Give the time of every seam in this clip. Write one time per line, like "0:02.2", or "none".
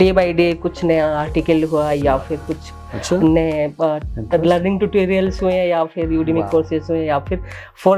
none